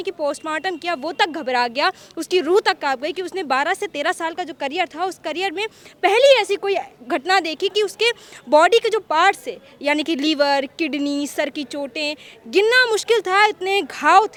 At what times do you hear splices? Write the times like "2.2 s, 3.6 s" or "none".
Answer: none

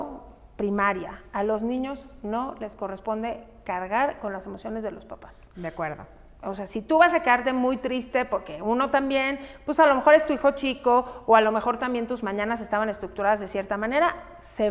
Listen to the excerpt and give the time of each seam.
none

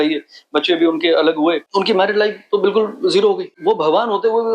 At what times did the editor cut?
1.6 s, 3.5 s

